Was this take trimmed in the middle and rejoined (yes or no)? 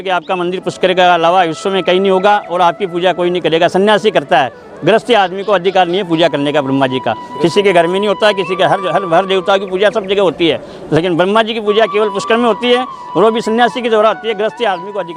no